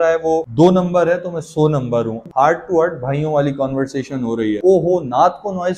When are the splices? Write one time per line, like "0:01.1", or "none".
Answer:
0:02.3
0:04.6